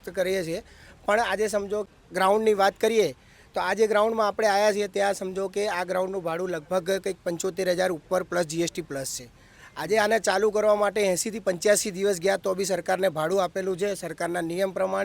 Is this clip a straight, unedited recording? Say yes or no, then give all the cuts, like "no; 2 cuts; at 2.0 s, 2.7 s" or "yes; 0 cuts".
no; 1 cut; at 2.0 s